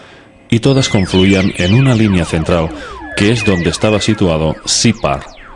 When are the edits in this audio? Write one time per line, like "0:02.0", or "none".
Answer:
0:04.2